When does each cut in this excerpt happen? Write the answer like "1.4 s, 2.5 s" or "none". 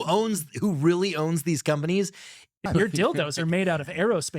2.7 s

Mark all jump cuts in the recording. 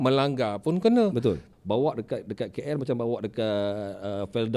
1.5 s

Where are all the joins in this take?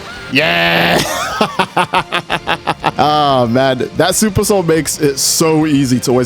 2.9 s

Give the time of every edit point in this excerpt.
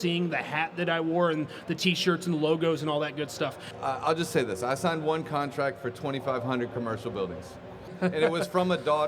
3.7 s, 7.9 s

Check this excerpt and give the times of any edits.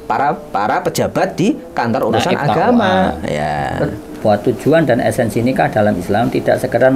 4.1 s

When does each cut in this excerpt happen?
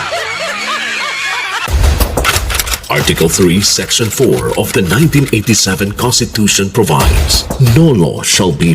1.7 s

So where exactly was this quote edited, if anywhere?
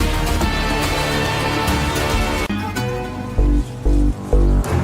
2.5 s

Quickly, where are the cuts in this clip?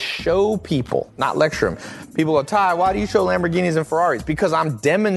1.1 s

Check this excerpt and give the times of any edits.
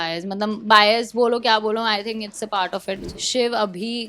3.0 s

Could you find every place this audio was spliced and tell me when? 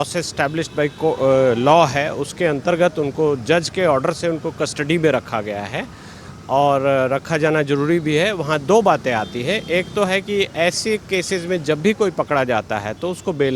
none

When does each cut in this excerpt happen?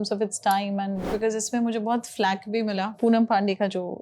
1.1 s, 3.0 s

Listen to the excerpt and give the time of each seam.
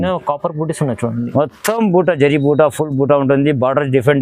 none

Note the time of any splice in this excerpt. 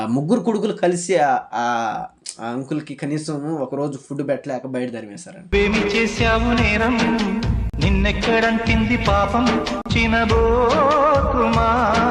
none

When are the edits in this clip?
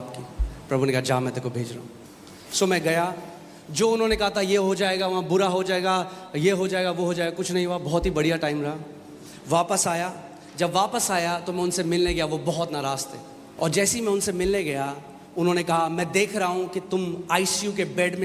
13.4 s

